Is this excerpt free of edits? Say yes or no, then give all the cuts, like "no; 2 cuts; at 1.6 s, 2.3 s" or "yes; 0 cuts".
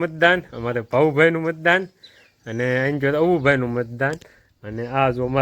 yes; 0 cuts